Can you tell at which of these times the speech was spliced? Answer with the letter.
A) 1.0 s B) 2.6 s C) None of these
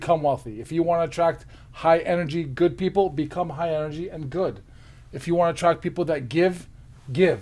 C